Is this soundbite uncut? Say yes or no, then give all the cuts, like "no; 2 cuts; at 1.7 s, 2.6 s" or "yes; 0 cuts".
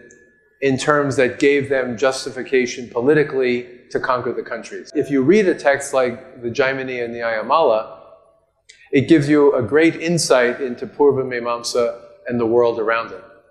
no; 1 cut; at 4.9 s